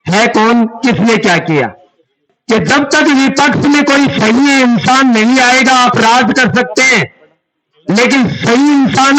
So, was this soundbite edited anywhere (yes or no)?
yes